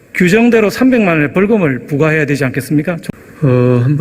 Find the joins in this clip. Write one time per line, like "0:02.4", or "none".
0:03.0